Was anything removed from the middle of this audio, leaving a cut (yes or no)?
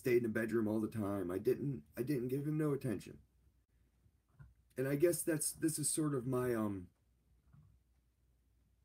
no